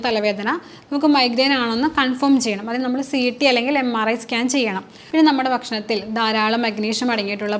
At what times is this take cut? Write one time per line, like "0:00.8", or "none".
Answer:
0:04.9